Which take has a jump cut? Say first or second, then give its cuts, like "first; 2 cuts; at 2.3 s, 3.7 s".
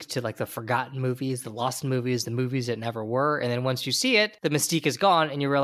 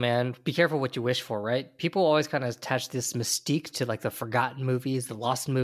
first; 1 cut; at 4.3 s